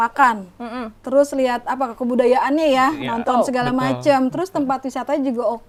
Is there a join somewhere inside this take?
no; 0 cuts

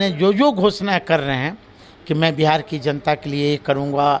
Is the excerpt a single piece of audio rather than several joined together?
yes; 0 cuts

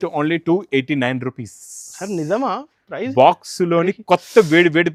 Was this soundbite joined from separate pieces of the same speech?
no; 0 cuts

